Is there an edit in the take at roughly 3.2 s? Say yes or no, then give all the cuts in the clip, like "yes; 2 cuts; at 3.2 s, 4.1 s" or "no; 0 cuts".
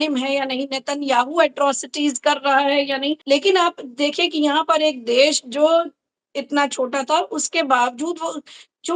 yes; 1 cut; at 3.2 s